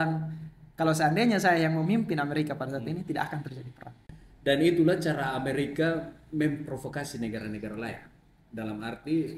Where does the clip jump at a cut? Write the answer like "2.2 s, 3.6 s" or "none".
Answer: 4.1 s